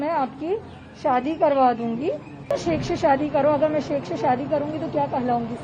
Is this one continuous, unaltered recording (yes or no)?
no